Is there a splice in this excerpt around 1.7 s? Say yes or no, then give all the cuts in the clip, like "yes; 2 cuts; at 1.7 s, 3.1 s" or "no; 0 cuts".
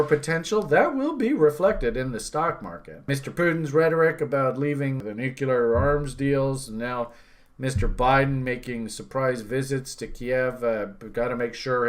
no; 1 cut; at 3.2 s